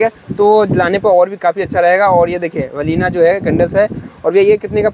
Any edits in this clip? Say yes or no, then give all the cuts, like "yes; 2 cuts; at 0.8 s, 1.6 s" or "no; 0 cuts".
no; 0 cuts